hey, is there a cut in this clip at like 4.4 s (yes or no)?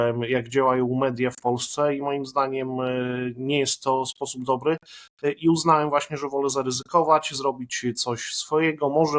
no